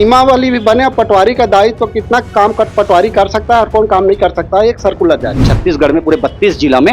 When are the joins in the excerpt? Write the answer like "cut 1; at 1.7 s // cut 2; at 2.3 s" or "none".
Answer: cut 1; at 5.5 s